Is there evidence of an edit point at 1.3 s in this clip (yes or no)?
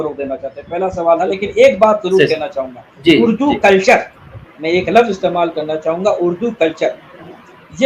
yes